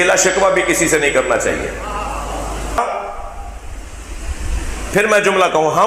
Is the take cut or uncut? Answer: cut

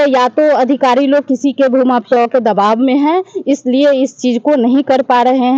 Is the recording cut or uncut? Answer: uncut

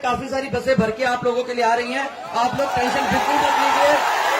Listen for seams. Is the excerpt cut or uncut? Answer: uncut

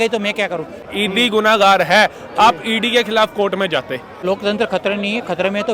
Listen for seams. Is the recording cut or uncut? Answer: cut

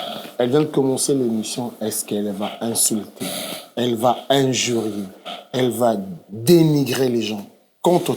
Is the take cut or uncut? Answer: uncut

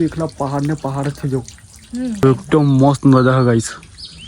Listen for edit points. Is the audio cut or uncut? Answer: cut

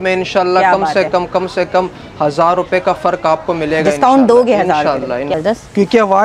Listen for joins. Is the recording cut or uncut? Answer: cut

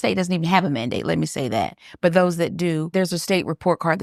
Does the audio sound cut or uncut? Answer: uncut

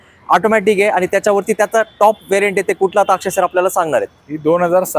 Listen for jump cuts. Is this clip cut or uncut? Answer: uncut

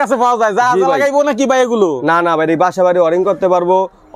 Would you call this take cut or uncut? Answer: uncut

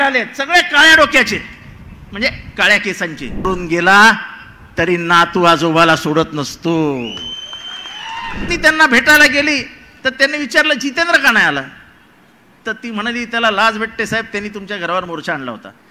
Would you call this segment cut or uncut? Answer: cut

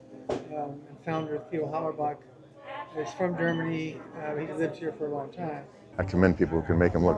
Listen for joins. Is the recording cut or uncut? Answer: cut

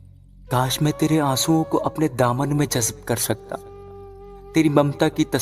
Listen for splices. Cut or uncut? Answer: uncut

